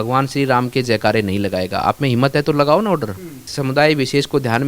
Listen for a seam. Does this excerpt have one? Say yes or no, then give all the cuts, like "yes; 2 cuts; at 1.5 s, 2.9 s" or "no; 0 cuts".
yes; 1 cut; at 3.5 s